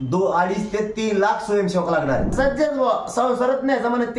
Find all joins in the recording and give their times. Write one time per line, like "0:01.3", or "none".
0:02.3